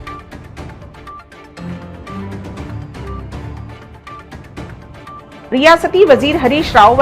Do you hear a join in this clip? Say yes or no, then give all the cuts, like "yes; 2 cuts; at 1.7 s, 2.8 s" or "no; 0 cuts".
no; 0 cuts